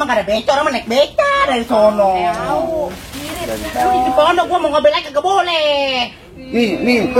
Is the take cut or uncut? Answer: cut